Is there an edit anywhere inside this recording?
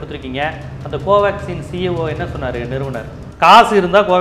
yes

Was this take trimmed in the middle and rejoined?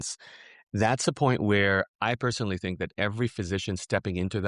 no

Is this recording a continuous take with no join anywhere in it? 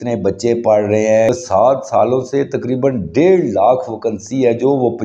no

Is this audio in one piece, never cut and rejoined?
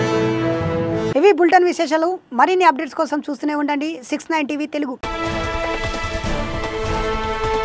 yes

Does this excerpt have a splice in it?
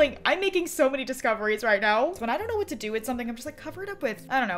yes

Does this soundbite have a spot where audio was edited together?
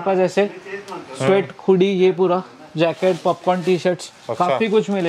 no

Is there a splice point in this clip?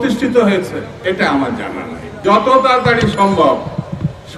yes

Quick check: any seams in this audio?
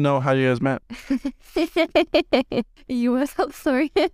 yes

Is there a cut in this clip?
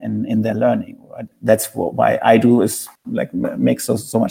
yes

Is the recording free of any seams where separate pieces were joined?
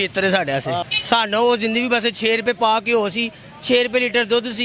no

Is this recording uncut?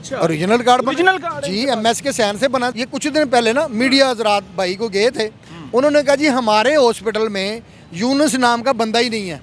no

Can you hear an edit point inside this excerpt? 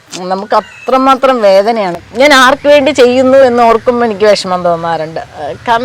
yes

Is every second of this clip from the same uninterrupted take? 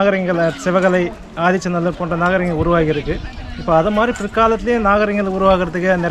yes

